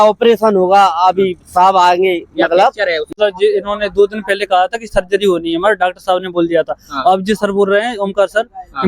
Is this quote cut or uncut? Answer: cut